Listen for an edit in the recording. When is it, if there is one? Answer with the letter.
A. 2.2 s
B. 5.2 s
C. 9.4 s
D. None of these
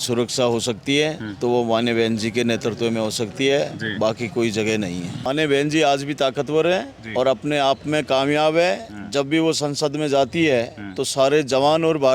B